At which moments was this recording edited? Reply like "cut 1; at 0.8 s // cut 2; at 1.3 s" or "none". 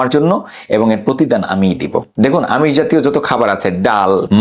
cut 1; at 2.1 s

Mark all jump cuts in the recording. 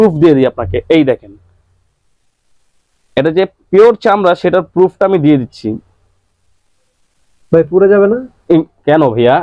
none

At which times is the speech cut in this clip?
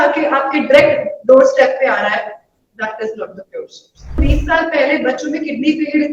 cut 1; at 4.2 s

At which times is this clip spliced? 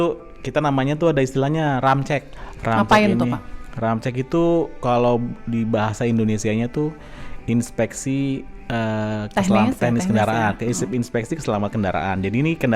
cut 1; at 2.4 s

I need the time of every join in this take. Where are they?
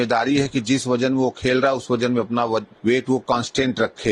cut 1; at 2.7 s

